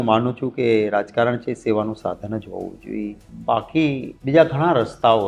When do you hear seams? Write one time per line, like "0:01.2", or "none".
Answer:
0:03.3
0:04.1